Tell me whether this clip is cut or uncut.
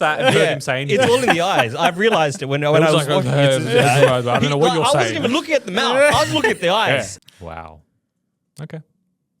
cut